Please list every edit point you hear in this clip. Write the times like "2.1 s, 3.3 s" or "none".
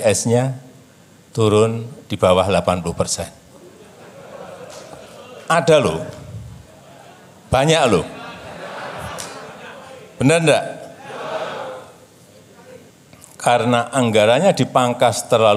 12.9 s